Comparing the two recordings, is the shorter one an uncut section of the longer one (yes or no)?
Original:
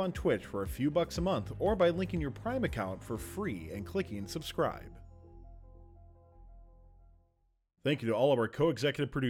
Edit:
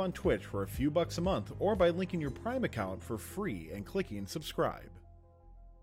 no